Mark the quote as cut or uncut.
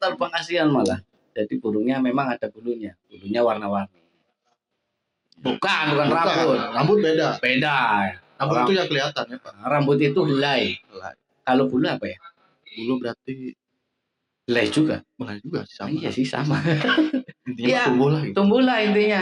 uncut